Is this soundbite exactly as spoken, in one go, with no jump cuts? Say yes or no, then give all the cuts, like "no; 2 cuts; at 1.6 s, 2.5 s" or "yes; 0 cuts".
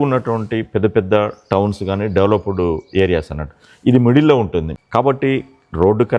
no; 1 cut; at 4.7 s